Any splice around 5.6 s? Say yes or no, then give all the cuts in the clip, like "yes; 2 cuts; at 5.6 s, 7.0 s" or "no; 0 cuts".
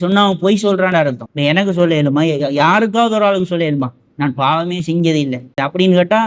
yes; 2 cuts; at 1.2 s, 5.6 s